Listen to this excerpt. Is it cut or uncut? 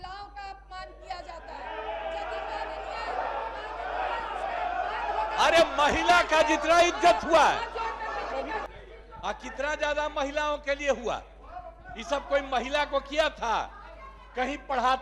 cut